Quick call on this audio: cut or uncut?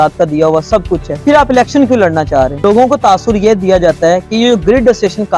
cut